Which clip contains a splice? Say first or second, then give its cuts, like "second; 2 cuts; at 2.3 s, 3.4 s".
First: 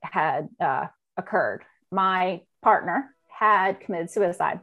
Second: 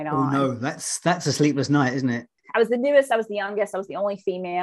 second; 1 cut; at 2.3 s